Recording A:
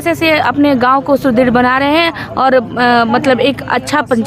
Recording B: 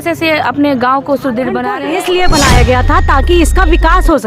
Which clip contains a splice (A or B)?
B